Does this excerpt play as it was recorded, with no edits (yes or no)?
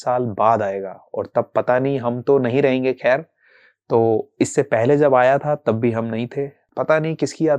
no